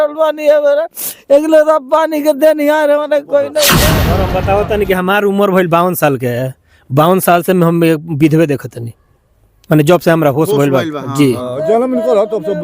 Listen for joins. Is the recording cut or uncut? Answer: cut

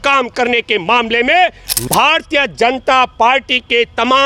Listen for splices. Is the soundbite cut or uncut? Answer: cut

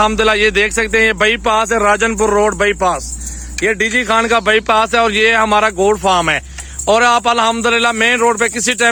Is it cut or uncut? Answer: uncut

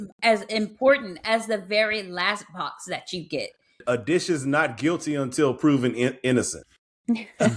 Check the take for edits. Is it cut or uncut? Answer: cut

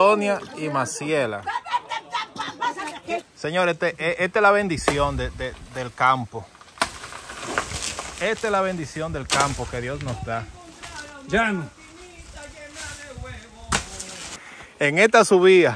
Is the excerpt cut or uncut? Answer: cut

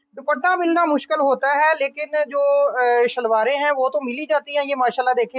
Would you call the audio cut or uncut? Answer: uncut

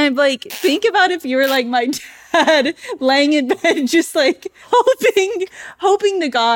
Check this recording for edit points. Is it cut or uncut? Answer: cut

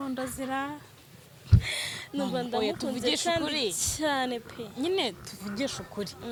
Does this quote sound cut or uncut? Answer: uncut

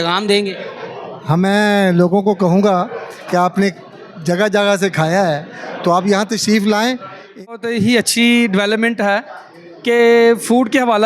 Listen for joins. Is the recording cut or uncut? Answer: cut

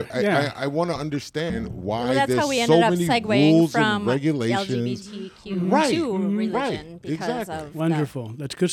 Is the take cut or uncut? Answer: cut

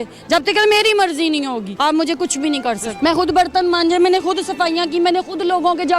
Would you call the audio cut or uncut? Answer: cut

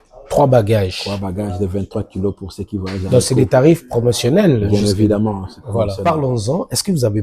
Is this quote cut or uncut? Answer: cut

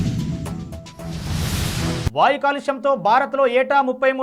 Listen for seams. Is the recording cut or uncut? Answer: cut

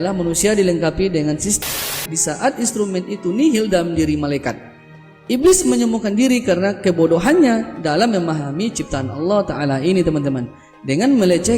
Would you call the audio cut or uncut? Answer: cut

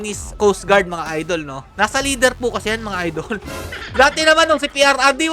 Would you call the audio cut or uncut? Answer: cut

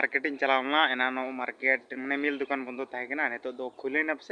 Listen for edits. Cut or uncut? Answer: uncut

